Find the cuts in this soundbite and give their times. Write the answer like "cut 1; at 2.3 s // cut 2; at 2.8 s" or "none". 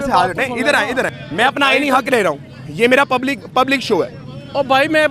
cut 1; at 1.2 s